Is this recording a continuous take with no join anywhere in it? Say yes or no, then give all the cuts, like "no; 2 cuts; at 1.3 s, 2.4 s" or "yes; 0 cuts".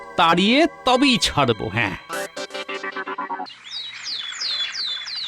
no; 1 cut; at 3.5 s